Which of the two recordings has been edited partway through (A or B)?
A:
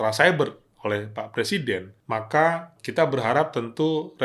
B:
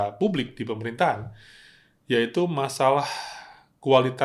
A